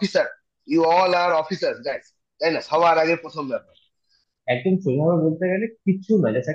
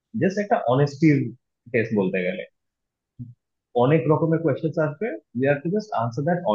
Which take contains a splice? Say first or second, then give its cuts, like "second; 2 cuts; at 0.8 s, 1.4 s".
first; 1 cut; at 4.3 s